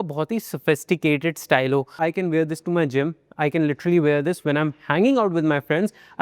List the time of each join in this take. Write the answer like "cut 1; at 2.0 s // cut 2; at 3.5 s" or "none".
cut 1; at 2.0 s